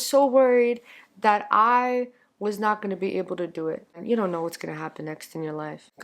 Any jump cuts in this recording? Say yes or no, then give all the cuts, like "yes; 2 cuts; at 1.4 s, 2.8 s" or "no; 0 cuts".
yes; 1 cut; at 4.0 s